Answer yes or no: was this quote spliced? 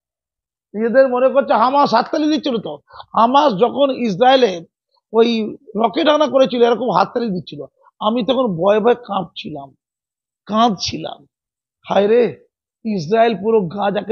no